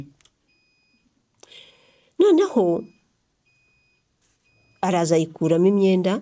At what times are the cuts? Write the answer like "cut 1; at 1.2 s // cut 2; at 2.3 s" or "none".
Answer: none